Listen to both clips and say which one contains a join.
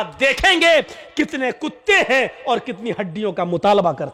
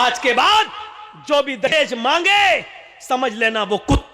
second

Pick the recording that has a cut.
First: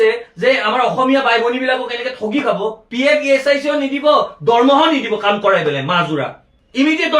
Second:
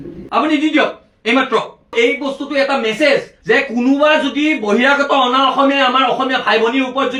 first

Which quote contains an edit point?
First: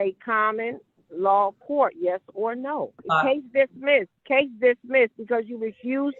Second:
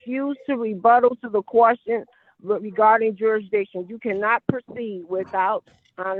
first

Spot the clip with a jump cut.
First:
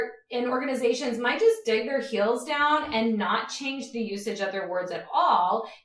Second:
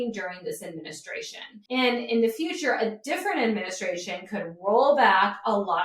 second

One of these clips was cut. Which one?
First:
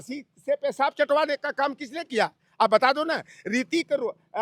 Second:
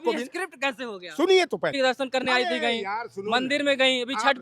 second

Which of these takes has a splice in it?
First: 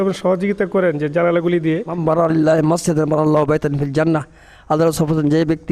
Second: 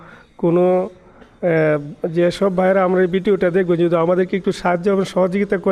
first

